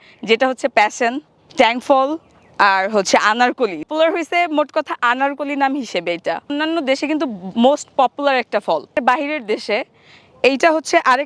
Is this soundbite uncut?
no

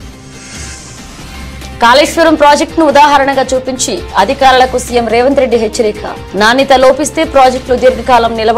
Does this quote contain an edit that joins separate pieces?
yes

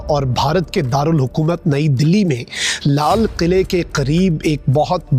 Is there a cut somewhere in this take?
no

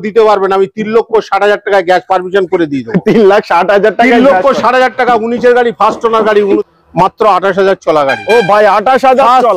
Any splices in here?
yes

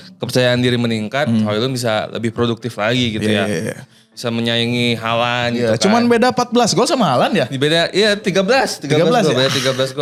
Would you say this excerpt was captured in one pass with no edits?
yes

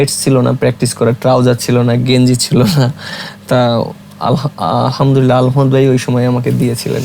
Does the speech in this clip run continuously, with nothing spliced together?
yes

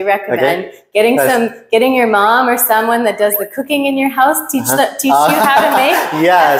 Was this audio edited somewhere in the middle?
no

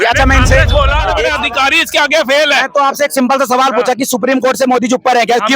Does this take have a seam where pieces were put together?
yes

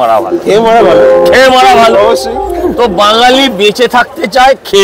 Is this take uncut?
yes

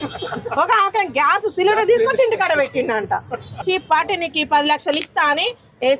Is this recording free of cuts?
no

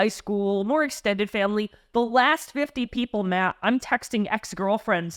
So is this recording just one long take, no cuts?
yes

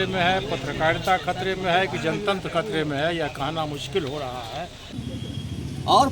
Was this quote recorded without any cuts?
no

